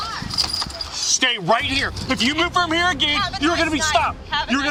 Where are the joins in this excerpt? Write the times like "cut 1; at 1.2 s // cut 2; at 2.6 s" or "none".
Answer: none